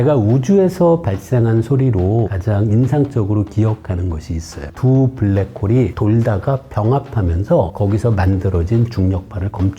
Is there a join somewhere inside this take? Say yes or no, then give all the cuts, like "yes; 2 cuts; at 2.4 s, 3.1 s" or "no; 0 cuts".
yes; 3 cuts; at 2.4 s, 4.7 s, 7.7 s